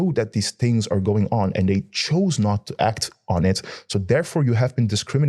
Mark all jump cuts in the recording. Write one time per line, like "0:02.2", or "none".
none